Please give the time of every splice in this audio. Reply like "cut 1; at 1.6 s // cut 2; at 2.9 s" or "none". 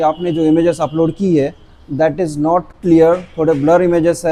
none